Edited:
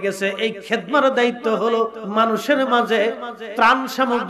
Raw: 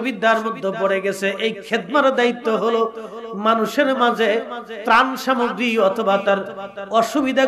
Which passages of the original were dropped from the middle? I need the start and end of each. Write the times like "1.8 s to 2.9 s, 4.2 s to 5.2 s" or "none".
3.0 s to 3.3 s